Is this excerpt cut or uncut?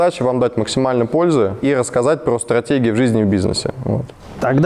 uncut